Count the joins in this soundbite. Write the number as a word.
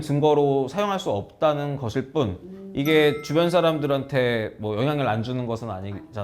zero